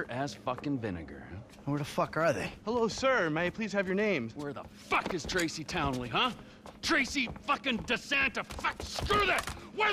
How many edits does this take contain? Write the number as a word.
zero